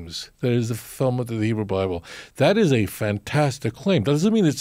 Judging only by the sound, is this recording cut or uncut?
uncut